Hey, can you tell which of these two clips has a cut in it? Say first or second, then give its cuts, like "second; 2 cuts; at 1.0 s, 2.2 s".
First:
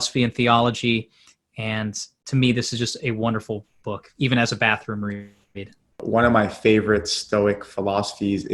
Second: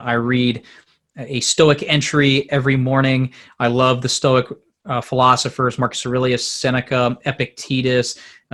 first; 1 cut; at 6.0 s